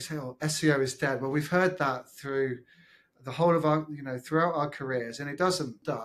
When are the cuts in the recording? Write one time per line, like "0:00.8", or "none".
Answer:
none